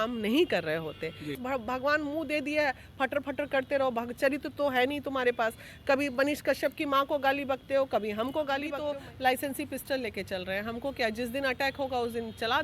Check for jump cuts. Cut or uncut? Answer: cut